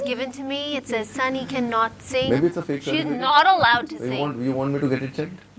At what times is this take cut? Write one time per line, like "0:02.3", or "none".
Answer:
none